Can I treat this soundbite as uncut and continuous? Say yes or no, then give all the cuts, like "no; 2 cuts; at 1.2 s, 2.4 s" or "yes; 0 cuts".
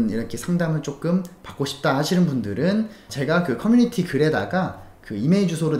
no; 1 cut; at 3.0 s